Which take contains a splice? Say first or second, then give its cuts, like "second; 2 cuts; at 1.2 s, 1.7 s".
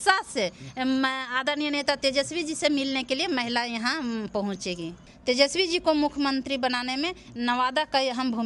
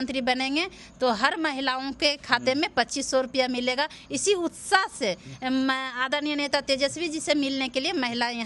first; 1 cut; at 5.0 s